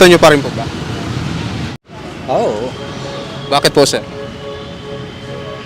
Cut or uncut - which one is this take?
cut